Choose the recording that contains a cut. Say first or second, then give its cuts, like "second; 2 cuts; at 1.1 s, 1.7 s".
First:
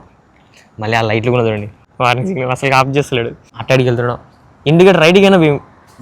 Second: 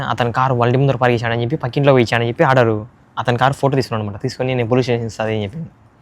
first; 2 cuts; at 1.8 s, 3.5 s